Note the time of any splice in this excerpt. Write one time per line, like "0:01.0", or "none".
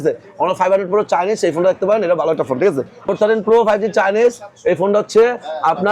0:03.1